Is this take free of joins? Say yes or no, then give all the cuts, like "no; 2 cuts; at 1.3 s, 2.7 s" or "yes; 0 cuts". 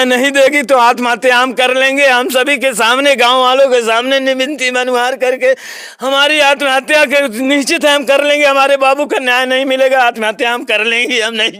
yes; 0 cuts